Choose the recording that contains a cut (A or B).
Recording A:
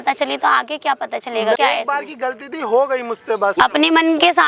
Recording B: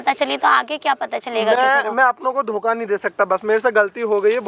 A